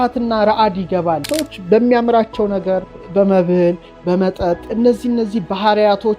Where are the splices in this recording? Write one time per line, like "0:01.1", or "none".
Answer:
0:01.2
0:03.0
0:04.7